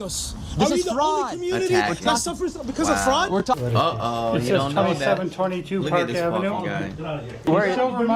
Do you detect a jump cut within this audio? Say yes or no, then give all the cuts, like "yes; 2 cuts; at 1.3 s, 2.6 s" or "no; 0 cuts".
yes; 1 cut; at 3.5 s